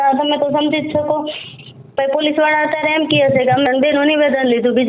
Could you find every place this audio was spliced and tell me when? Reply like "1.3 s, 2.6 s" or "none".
2.0 s, 3.7 s